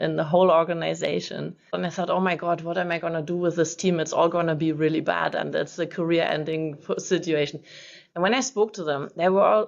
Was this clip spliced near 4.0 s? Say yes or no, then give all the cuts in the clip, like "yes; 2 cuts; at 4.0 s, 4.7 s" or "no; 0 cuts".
no; 1 cut; at 1.8 s